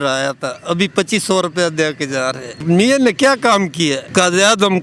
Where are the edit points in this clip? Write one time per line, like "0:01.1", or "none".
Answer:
0:02.6
0:04.0